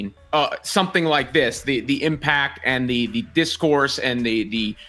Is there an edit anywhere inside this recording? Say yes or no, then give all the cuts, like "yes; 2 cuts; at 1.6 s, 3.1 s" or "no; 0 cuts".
no; 0 cuts